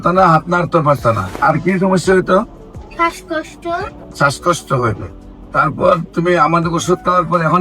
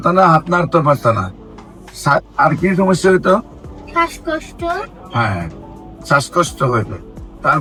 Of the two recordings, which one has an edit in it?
first; 2 cuts; at 1.3 s, 4.0 s

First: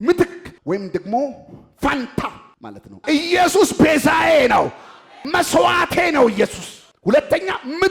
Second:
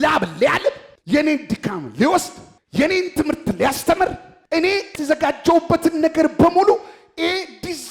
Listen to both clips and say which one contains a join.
first; 1 cut; at 3.0 s

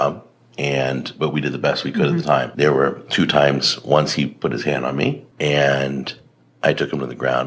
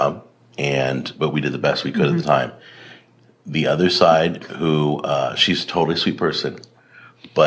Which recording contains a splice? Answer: first; 2 cuts; at 2.5 s, 5.3 s

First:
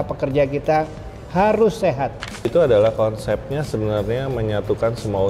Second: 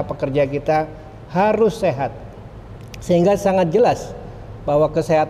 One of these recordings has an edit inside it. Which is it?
first; 1 cut; at 2.5 s

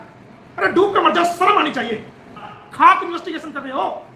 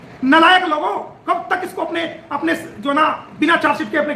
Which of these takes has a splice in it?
first; 1 cut; at 2.6 s

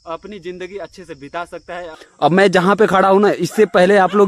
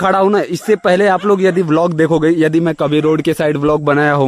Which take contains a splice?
first; 1 cut; at 2.0 s

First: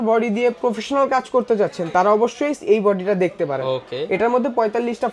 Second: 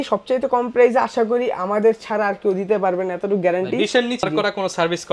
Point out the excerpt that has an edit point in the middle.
second; 1 cut; at 4.2 s

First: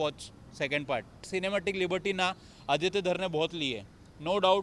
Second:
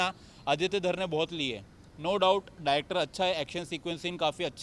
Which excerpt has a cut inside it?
first; 1 cut; at 1.3 s

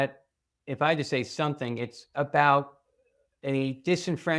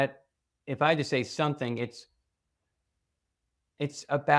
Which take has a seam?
first; 1 cut; at 2.0 s

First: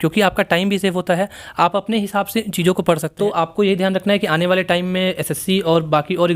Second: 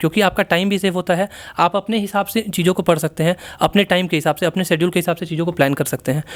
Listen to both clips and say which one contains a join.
first; 1 cut; at 3.1 s

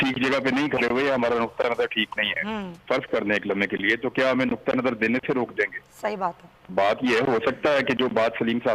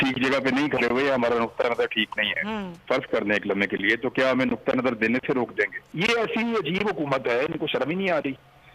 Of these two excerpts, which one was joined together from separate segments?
second; 1 cut; at 5.8 s

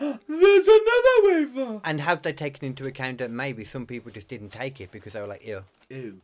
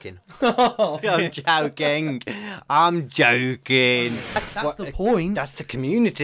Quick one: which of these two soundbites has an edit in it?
second; 2 cuts; at 1.0 s, 4.3 s

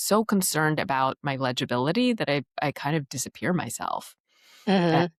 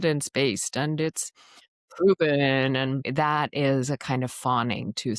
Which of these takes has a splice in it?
second; 1 cut; at 3.1 s

